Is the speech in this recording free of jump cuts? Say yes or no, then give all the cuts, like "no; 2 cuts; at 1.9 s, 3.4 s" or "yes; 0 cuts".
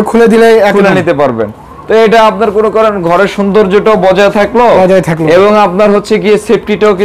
yes; 0 cuts